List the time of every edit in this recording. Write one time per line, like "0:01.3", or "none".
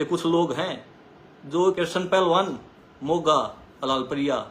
0:01.6